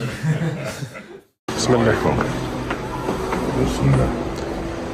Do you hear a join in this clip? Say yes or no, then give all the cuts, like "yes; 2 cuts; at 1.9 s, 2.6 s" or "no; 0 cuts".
yes; 1 cut; at 1.1 s